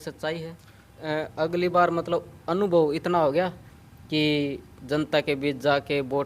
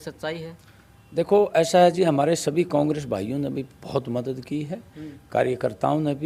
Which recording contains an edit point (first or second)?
first